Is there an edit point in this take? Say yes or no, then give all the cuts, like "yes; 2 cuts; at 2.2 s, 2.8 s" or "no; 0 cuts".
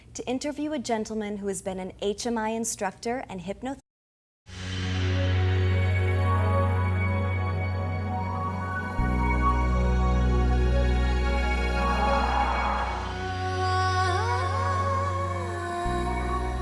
no; 0 cuts